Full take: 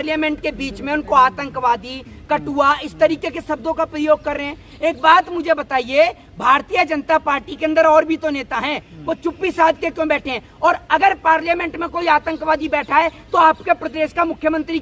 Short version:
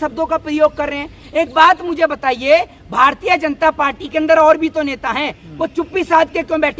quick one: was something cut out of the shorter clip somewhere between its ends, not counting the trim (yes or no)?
no